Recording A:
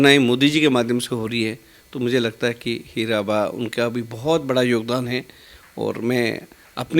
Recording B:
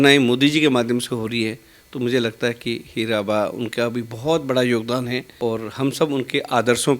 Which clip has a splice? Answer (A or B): B